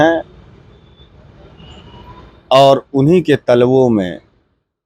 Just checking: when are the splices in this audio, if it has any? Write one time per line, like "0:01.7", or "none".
none